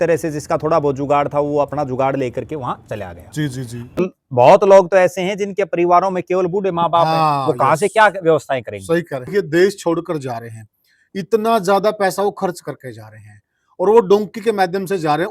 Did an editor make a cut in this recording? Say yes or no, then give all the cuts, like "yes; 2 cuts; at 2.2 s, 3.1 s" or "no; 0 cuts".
yes; 2 cuts; at 4.0 s, 9.3 s